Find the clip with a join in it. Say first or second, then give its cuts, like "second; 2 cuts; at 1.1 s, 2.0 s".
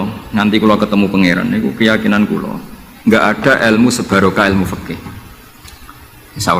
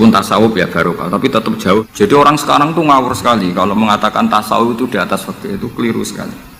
second; 1 cut; at 1.8 s